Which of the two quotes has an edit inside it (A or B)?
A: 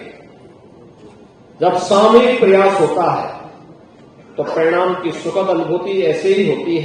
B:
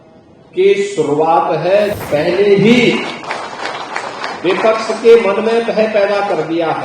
B